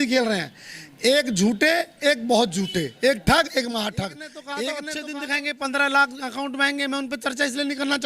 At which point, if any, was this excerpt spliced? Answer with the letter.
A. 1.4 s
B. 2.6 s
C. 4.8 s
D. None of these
C